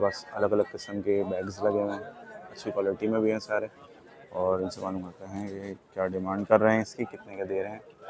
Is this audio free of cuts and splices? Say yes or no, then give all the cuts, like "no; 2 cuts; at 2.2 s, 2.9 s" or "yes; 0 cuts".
yes; 0 cuts